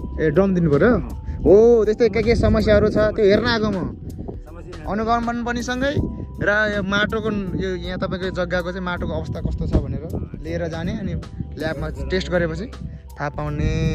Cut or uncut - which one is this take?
uncut